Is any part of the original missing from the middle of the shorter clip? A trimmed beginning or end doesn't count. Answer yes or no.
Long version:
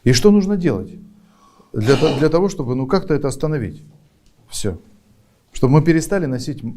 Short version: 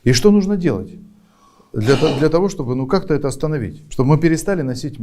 yes